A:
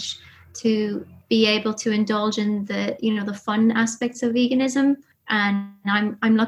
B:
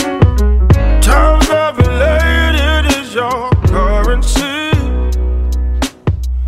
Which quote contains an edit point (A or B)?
A